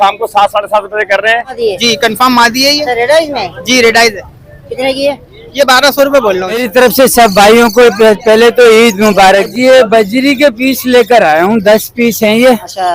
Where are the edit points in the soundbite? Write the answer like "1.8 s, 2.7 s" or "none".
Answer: 1.6 s, 6.6 s, 9.5 s

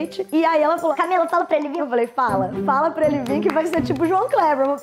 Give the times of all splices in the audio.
none

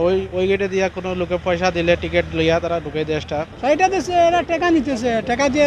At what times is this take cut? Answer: 3.5 s

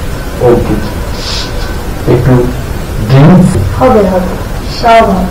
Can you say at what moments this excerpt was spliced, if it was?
3.7 s

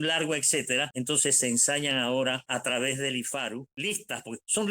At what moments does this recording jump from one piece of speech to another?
0.9 s, 2.4 s, 3.8 s

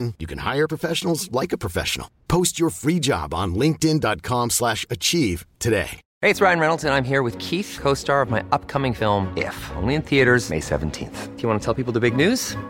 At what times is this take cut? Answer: none

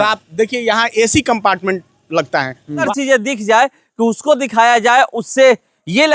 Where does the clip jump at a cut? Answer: 2.9 s

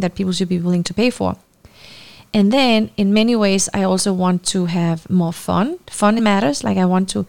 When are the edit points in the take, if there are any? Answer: 6.2 s

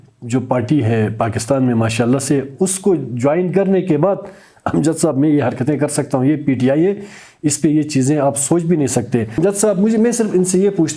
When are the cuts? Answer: 9.4 s

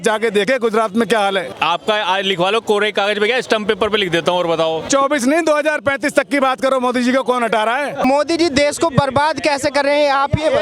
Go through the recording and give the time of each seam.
1.5 s, 4.9 s, 8.0 s

